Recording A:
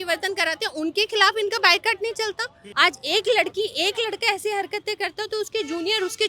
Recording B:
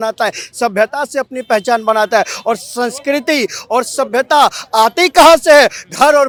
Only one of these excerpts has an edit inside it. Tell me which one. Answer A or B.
A